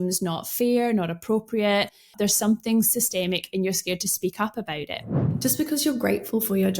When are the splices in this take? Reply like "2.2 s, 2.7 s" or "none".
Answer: 2.0 s, 5.3 s